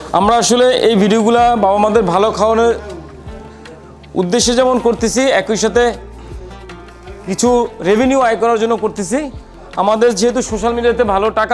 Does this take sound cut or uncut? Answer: uncut